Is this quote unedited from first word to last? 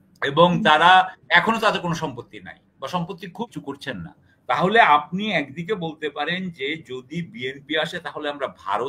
no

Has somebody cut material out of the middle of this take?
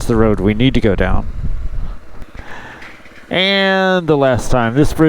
yes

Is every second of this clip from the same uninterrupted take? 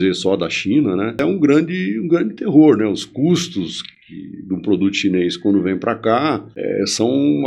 no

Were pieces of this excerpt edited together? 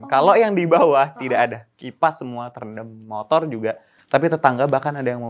no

